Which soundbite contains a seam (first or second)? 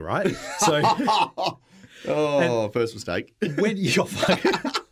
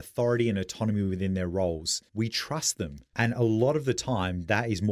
second